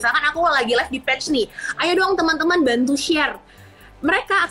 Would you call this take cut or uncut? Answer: uncut